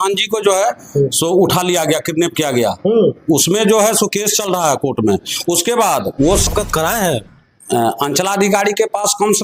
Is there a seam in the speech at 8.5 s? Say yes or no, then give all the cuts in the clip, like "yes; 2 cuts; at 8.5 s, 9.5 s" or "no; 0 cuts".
no; 1 cut; at 6.5 s